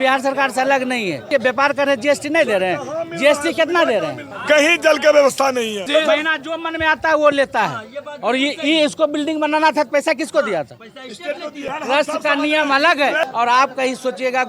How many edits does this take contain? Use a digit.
5